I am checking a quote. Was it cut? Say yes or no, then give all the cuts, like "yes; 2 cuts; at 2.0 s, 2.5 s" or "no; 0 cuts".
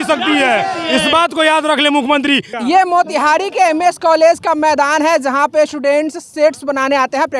yes; 1 cut; at 2.5 s